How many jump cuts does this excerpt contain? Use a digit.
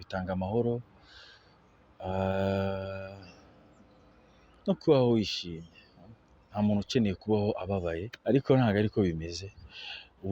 1